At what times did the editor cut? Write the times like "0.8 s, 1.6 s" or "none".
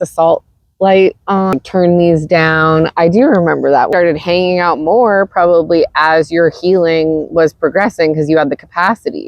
1.6 s, 3.9 s